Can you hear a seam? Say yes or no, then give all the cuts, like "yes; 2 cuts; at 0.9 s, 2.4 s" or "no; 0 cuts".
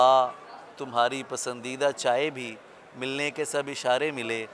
no; 0 cuts